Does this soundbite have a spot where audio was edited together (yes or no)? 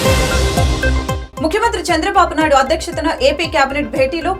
yes